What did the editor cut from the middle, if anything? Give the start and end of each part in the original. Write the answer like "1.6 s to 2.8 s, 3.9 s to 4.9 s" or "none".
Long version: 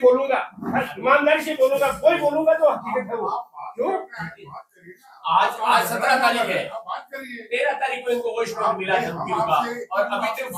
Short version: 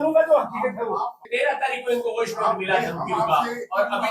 3.5 s to 7.4 s